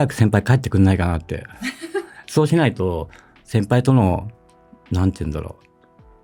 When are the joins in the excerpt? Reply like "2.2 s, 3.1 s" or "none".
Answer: none